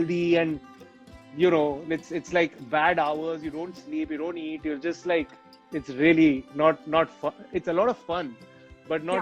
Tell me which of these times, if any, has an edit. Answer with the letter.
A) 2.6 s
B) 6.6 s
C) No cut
C